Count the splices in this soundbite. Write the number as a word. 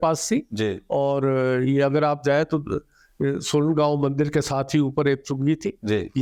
zero